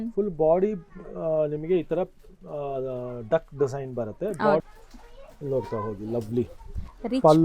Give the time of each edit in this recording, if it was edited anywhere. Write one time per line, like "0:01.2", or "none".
0:04.6